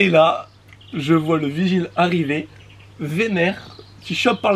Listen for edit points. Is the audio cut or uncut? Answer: uncut